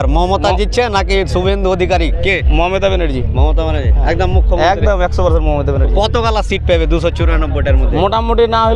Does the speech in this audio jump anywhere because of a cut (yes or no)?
no